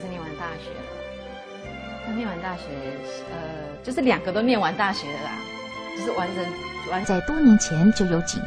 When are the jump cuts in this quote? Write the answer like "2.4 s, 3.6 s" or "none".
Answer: none